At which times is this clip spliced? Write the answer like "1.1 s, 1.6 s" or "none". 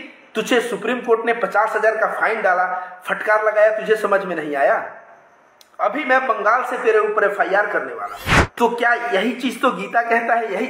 8.4 s